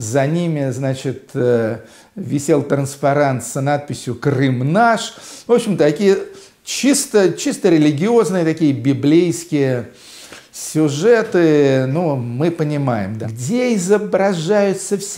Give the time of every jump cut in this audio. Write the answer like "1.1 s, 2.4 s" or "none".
13.2 s